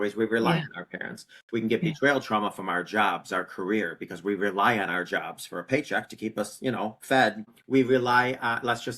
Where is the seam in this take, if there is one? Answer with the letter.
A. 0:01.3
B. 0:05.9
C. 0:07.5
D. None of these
C